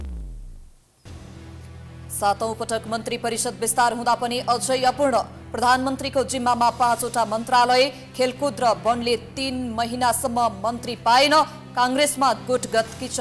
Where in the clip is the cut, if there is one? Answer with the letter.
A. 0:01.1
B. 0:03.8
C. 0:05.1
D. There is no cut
A